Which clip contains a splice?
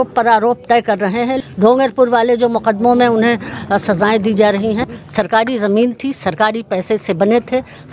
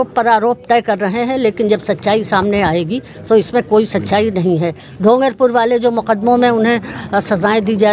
first; 2 cuts; at 1.4 s, 5.0 s

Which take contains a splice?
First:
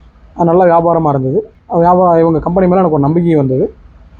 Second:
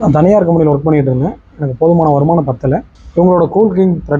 first; 1 cut; at 1.6 s

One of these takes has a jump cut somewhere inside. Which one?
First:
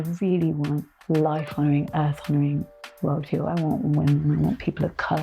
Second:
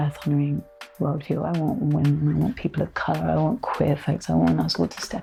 first; 1 cut; at 0.9 s

